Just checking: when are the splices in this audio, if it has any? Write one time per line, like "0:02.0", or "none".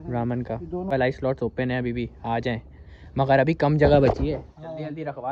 0:00.9